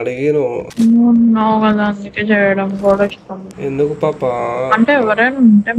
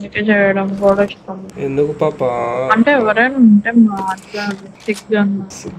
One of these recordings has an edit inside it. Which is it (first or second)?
second